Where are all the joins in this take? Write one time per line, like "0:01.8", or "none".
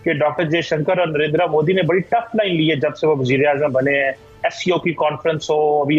none